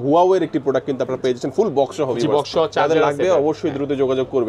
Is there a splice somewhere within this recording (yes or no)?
no